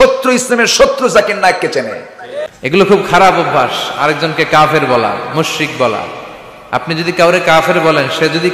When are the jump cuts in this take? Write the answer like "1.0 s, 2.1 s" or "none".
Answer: 2.3 s